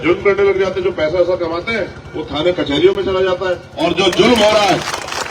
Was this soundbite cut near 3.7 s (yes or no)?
yes